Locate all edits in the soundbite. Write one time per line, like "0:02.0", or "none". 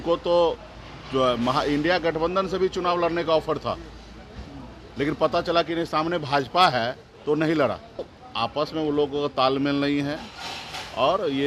0:08.2